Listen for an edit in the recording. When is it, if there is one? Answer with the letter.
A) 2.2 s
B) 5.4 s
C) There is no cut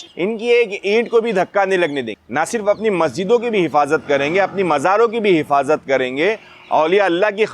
A